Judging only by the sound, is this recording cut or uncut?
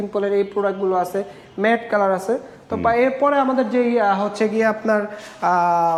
uncut